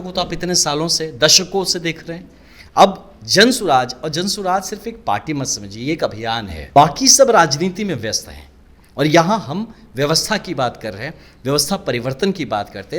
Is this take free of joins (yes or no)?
no